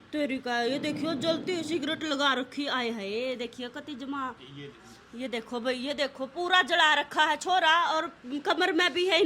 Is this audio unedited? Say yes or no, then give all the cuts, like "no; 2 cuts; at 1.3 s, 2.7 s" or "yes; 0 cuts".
yes; 0 cuts